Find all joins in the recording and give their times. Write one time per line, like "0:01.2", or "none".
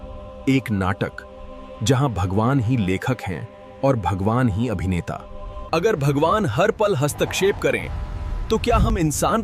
0:05.7